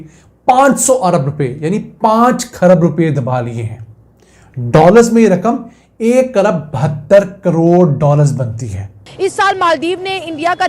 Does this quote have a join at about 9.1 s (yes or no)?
yes